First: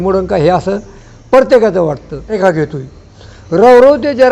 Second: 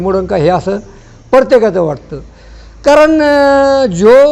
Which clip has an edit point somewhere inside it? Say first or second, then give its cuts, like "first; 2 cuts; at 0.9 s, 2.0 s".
first; 1 cut; at 2.3 s